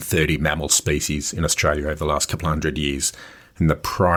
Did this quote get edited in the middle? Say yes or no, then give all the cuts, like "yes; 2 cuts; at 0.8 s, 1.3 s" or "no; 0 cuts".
no; 0 cuts